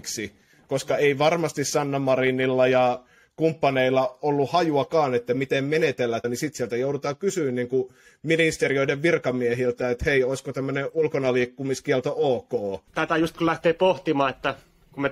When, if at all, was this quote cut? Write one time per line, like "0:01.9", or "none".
0:06.2
0:12.9